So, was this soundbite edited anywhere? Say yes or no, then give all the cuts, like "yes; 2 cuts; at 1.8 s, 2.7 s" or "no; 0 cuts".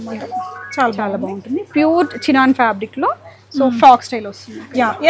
no; 0 cuts